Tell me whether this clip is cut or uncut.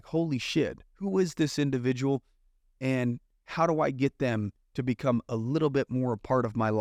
uncut